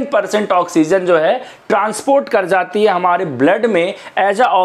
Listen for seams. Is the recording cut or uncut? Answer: uncut